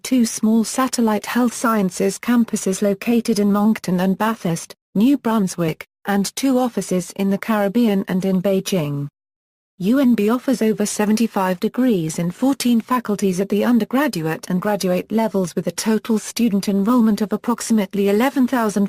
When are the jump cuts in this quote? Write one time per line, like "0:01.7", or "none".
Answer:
0:10.7